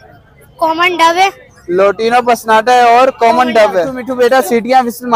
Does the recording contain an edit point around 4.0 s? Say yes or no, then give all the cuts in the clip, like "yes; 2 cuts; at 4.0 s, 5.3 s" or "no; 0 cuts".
yes; 1 cut; at 4.0 s